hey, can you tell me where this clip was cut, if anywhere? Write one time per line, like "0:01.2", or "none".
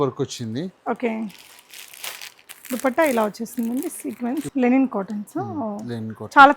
0:04.5